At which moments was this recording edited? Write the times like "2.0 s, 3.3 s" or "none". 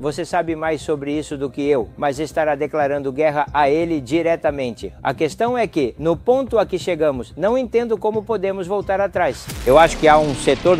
9.5 s